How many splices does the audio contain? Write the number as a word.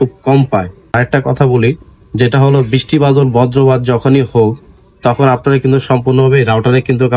one